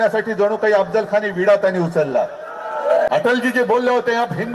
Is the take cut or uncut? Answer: cut